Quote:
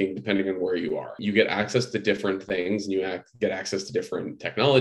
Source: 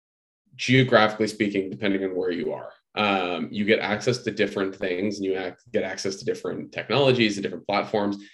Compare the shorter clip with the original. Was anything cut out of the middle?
yes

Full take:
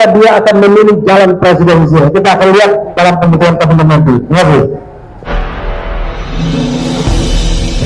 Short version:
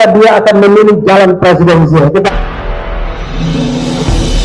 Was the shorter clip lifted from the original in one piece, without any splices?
no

